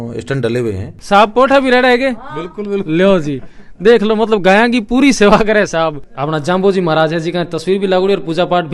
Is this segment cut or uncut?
cut